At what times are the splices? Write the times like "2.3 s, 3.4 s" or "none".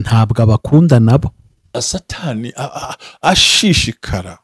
1.8 s